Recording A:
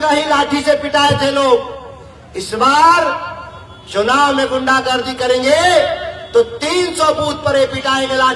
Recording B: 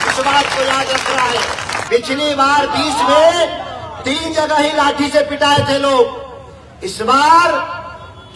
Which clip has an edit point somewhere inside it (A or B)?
B